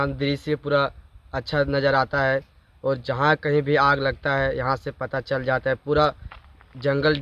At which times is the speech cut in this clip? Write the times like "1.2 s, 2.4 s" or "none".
none